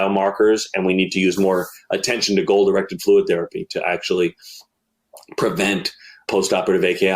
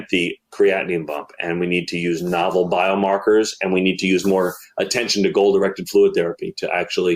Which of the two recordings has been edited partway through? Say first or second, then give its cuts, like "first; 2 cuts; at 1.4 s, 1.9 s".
first; 1 cut; at 6.3 s